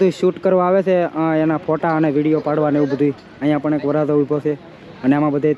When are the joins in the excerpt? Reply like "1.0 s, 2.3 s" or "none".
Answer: none